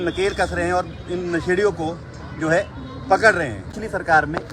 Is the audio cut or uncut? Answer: cut